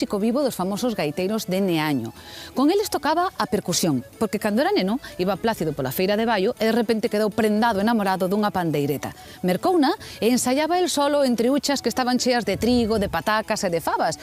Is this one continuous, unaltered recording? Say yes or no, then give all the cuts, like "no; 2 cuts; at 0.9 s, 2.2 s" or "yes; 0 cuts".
no; 1 cut; at 1.3 s